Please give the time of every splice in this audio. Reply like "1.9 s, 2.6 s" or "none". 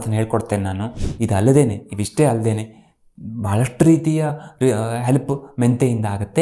1.0 s